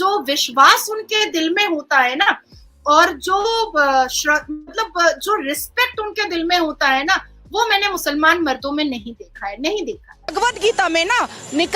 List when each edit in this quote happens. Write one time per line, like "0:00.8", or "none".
0:10.3